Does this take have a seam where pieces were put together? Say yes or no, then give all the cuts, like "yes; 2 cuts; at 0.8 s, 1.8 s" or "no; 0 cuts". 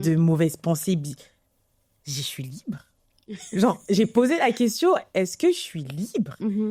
no; 0 cuts